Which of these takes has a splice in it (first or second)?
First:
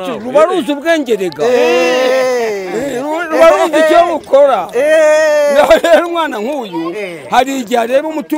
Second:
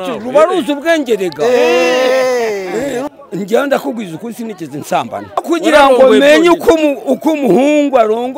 second